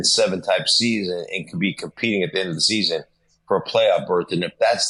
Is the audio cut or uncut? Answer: uncut